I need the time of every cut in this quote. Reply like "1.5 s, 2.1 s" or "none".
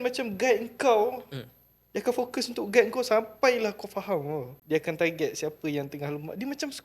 4.5 s